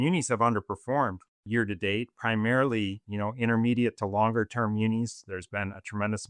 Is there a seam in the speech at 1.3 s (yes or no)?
yes